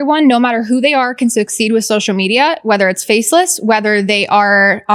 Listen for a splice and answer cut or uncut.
uncut